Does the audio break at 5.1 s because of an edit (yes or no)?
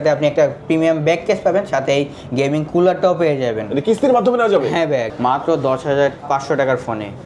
yes